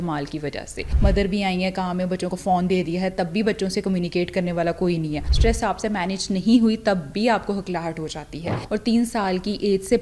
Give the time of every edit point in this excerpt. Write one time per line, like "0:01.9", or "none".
0:00.9
0:05.2
0:08.6